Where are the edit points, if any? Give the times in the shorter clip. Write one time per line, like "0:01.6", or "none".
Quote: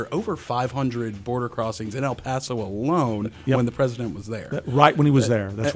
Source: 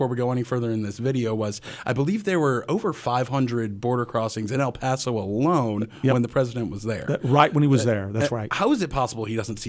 none